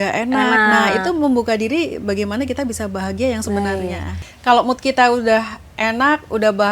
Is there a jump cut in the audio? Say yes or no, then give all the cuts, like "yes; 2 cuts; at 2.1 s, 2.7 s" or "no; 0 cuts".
yes; 1 cut; at 4.2 s